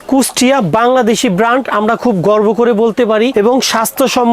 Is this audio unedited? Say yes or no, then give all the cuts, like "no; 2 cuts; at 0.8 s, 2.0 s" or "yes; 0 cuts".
no; 1 cut; at 3.3 s